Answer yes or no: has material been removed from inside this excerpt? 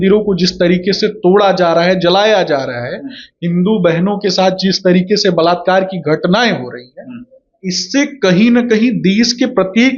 no